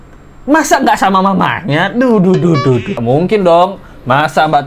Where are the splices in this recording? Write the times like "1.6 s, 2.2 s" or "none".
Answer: 3.0 s